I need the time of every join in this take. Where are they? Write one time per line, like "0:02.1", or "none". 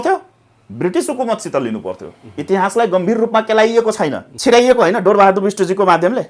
0:04.3